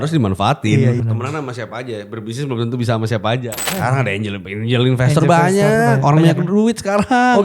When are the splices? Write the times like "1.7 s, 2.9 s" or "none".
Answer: 1.0 s, 3.5 s